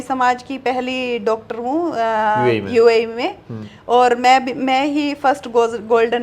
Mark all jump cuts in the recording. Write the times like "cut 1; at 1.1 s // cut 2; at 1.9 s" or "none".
none